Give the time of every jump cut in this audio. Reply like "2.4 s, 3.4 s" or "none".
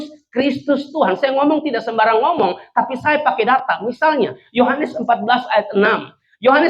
none